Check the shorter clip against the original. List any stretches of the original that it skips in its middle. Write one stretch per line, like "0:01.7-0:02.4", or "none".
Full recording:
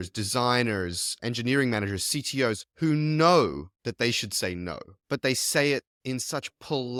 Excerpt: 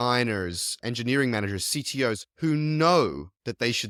none